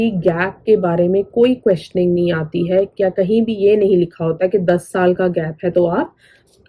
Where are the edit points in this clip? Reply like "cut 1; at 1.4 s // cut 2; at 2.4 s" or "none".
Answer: none